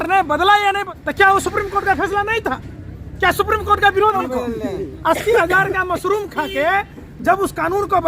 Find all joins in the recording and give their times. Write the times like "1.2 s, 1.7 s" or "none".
1.0 s, 4.2 s